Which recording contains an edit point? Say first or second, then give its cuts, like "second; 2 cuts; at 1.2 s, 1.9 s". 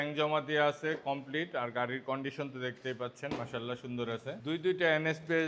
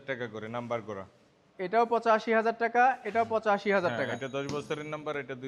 first; 1 cut; at 4.3 s